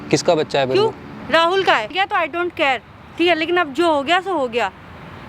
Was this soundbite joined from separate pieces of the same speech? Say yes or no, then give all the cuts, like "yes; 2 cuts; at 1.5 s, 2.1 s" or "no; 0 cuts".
yes; 1 cut; at 1.9 s